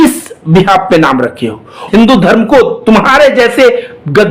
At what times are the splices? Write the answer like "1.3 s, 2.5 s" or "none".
1.8 s